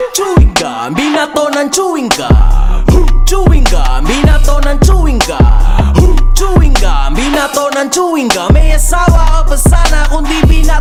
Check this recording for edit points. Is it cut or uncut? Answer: uncut